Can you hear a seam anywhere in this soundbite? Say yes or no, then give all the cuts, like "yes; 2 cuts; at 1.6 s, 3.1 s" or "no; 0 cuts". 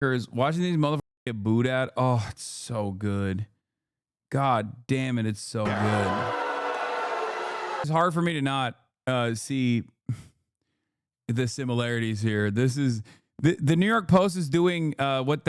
yes; 1 cut; at 7.9 s